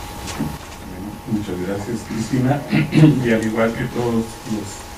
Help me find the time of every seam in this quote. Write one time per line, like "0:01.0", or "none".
none